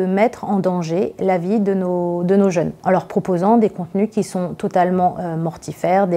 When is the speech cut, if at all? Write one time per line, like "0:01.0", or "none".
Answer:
0:02.8